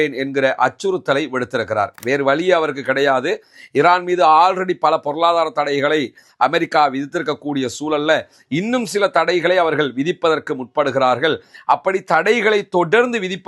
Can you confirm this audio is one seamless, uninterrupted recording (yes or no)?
yes